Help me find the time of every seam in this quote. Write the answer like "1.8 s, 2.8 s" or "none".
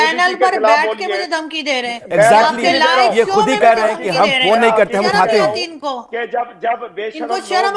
none